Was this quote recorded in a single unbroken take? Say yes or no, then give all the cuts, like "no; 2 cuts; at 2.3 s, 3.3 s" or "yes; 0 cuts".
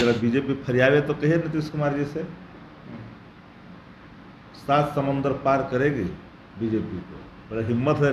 yes; 0 cuts